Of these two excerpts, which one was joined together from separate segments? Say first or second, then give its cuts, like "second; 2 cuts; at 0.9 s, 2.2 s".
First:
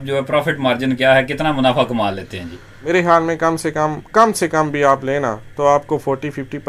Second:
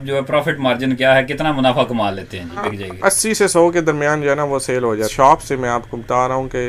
second; 2 cuts; at 2.7 s, 5.1 s